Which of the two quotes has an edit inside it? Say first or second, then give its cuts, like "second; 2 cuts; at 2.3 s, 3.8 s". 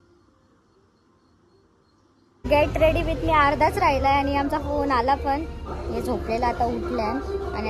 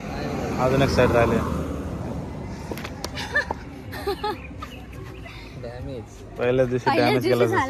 first; 1 cut; at 2.3 s